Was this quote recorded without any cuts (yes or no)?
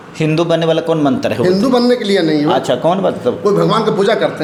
yes